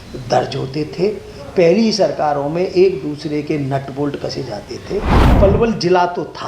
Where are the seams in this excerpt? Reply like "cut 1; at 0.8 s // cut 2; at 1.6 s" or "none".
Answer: cut 1; at 5.2 s